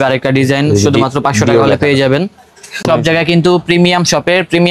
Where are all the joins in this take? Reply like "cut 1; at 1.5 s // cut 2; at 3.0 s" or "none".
cut 1; at 2.8 s